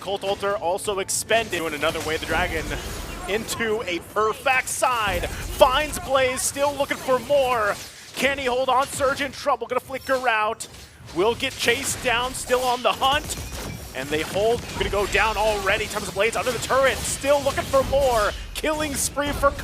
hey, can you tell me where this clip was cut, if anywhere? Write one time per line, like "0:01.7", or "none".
0:01.6
0:04.4
0:14.6

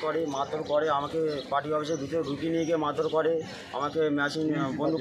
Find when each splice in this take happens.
none

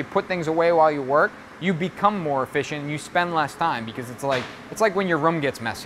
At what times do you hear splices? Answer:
none

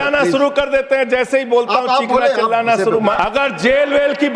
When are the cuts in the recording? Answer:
0:03.2

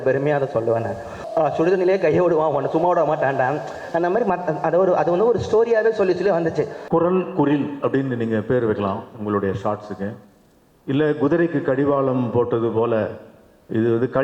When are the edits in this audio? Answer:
0:01.2
0:06.8

